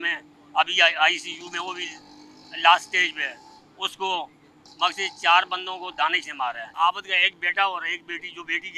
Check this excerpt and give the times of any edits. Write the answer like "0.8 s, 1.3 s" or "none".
6.7 s